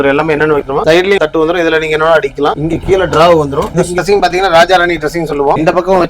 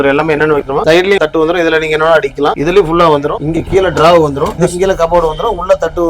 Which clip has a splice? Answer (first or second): first